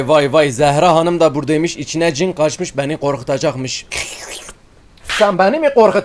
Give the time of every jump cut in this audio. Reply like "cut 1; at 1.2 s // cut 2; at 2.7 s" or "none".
cut 1; at 3.8 s

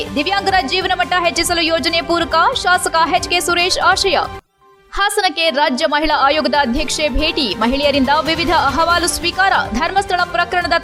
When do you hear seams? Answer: none

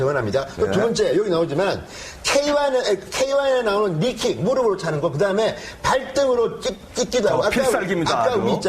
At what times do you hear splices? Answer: cut 1; at 1.5 s

